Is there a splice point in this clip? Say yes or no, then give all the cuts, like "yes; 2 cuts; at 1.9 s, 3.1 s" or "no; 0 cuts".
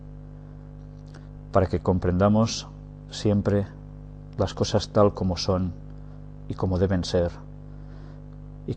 no; 0 cuts